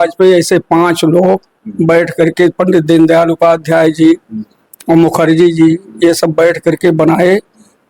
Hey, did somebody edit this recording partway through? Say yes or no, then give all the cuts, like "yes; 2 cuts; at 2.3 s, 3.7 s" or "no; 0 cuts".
no; 0 cuts